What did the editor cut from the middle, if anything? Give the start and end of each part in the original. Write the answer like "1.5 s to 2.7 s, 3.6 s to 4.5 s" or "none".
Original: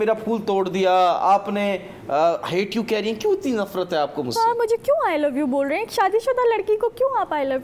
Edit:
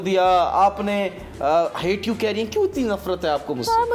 none